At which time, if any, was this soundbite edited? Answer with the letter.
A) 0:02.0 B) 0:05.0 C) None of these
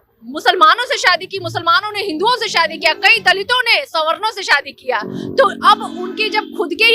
C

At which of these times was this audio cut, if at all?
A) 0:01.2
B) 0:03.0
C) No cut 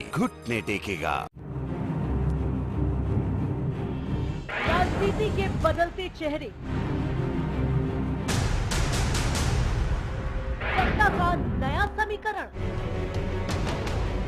A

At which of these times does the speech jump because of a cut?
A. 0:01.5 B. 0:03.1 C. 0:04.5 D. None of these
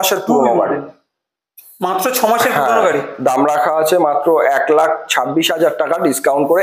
D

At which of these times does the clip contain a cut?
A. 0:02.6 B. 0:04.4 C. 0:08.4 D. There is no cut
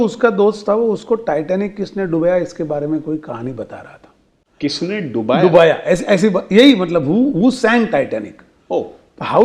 B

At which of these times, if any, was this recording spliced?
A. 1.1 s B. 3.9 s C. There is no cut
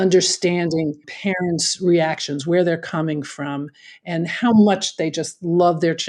A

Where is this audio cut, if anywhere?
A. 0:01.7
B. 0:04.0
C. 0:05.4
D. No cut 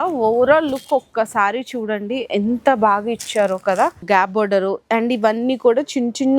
B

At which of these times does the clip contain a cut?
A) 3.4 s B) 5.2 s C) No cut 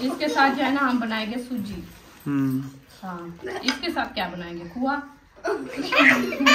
C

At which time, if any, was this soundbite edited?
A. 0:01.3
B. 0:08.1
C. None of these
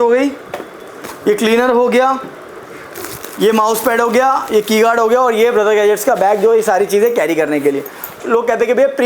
B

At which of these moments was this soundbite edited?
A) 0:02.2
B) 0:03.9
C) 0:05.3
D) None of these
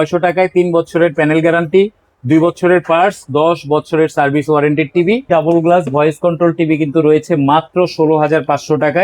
C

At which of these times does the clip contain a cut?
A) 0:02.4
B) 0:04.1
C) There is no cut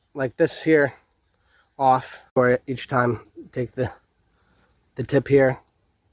A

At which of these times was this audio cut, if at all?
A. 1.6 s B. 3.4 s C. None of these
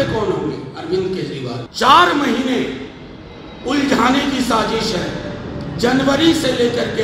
A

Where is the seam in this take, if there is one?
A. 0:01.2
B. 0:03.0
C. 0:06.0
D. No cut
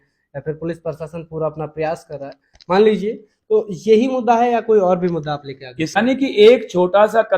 C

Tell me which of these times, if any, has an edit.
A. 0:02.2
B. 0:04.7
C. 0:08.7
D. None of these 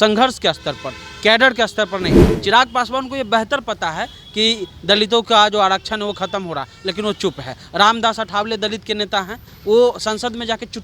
A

